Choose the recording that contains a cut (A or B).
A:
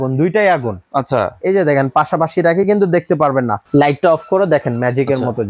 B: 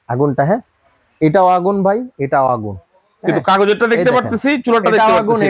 A